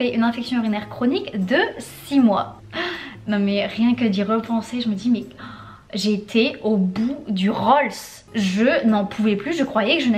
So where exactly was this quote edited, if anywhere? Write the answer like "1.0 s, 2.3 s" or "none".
none